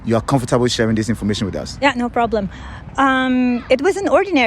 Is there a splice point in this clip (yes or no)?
no